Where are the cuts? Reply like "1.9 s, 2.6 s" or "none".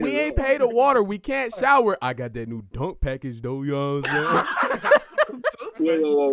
none